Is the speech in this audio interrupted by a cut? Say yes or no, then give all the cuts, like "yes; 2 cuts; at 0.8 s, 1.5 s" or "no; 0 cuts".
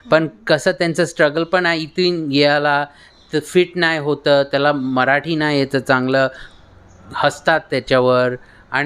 no; 0 cuts